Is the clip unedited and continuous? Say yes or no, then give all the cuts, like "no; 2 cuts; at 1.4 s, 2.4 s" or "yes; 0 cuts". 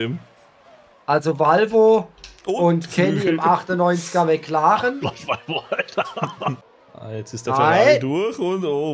no; 1 cut; at 6.6 s